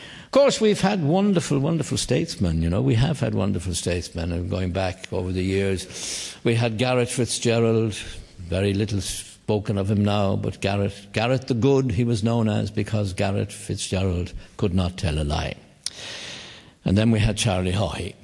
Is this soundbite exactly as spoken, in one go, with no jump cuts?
yes; 0 cuts

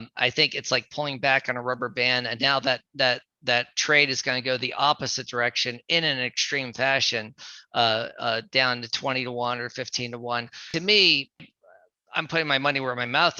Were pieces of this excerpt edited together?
yes; 2 cuts; at 10.6 s, 11.4 s

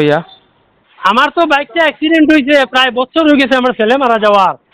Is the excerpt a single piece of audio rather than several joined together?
yes; 0 cuts

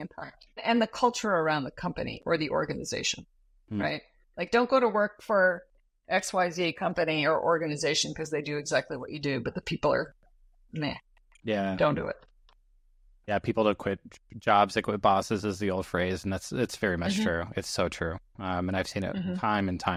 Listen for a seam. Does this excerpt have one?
no; 0 cuts

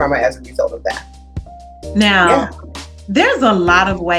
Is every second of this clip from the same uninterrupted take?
yes; 0 cuts

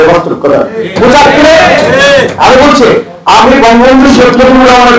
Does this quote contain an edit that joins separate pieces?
no; 0 cuts

